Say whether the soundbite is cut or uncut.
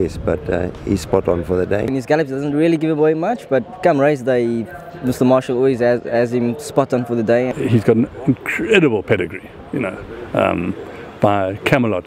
cut